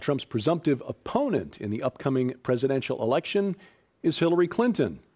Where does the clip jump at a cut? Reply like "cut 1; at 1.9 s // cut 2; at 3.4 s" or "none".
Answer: cut 1; at 3.4 s